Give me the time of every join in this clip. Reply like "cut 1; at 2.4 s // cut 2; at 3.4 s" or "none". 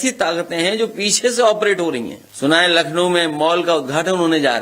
cut 1; at 2.2 s